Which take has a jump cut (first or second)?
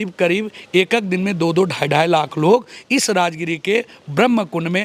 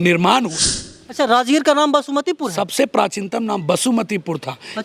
second